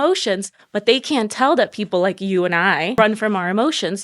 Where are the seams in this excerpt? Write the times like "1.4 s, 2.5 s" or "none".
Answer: 3.0 s